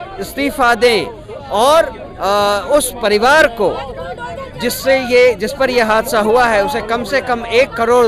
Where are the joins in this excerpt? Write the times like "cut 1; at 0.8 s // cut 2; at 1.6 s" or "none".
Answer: none